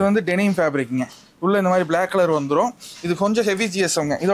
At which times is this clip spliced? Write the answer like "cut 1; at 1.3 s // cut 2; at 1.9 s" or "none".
none